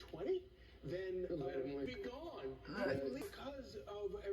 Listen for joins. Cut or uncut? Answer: cut